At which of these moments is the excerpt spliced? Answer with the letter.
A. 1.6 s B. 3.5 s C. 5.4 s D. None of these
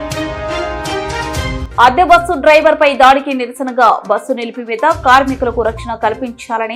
A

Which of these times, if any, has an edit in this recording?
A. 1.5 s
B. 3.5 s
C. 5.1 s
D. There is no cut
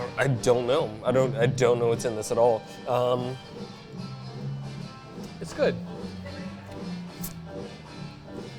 B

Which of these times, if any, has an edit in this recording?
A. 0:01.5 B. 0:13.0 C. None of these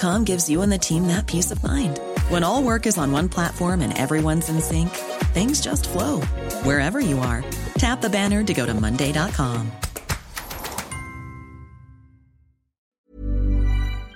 B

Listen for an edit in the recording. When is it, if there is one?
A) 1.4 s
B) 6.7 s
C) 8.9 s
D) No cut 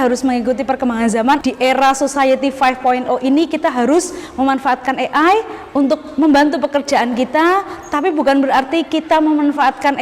A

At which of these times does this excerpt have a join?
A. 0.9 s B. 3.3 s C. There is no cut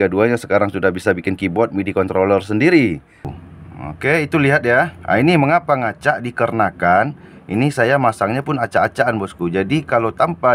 B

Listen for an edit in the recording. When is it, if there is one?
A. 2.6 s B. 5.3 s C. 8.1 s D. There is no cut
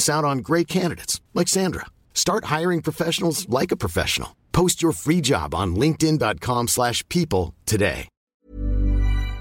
C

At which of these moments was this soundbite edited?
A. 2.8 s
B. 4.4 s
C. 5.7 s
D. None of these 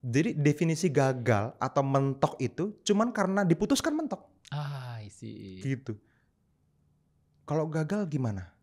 D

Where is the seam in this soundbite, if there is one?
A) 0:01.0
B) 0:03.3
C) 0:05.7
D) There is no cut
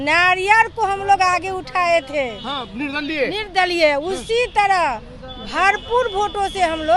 D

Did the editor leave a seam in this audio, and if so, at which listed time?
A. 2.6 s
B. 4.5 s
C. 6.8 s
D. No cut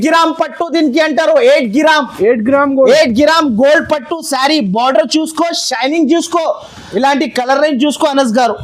C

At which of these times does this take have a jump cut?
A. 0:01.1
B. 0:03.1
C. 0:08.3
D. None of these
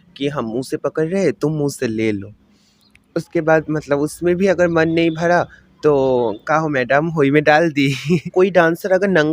C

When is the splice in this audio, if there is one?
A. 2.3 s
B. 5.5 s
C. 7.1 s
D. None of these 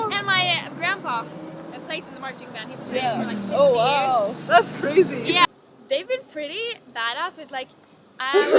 B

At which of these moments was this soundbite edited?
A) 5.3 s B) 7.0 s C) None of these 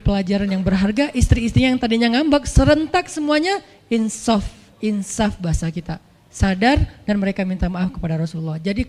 C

